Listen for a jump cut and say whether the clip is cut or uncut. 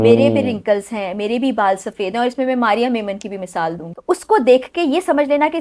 cut